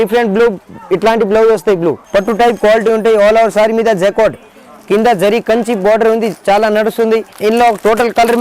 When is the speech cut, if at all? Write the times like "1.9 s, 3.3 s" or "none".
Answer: 2.0 s, 7.3 s